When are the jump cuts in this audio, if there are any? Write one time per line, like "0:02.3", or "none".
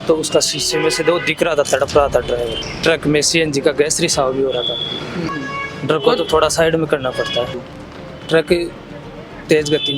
0:02.6
0:05.3
0:07.6